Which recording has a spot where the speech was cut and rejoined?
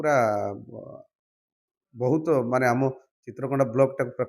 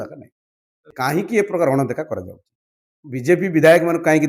second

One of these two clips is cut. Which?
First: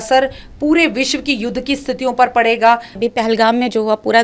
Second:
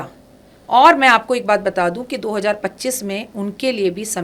first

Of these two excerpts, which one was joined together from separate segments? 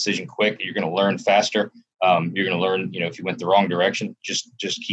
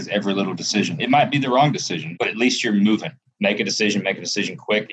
second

